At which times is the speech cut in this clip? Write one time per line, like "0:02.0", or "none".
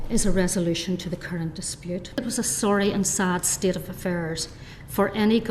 0:02.2